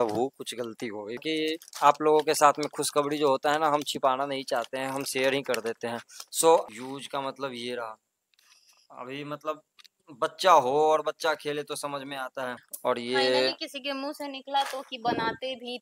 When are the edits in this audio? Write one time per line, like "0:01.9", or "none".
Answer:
0:01.2
0:06.6
0:12.7